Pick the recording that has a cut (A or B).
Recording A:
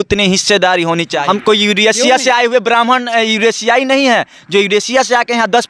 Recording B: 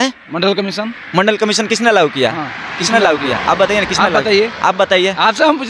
A